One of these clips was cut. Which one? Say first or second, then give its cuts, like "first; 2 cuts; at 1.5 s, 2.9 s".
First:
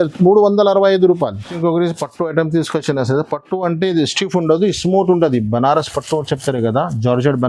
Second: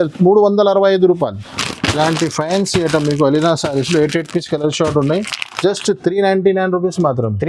second; 1 cut; at 1.4 s